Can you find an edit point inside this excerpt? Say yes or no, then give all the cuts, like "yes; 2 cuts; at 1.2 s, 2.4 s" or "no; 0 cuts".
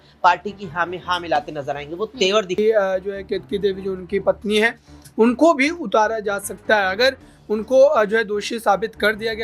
yes; 1 cut; at 2.6 s